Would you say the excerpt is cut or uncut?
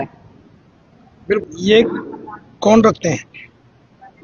cut